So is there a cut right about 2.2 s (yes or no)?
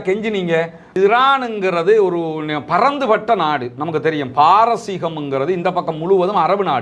no